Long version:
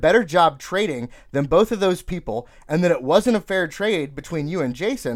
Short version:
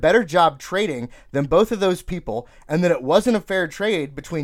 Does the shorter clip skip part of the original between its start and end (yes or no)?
no